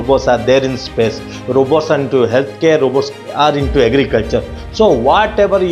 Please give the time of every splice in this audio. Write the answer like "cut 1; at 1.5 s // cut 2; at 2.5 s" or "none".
none